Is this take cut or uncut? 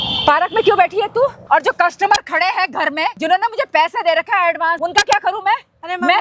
cut